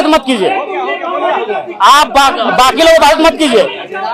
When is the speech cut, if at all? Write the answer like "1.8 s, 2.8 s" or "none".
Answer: none

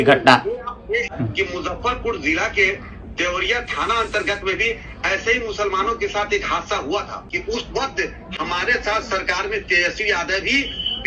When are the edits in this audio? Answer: 1.1 s, 7.3 s

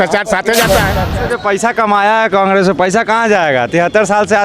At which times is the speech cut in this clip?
1.1 s

